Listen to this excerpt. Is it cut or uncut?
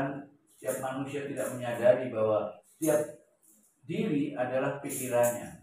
cut